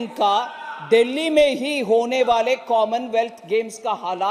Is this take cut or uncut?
uncut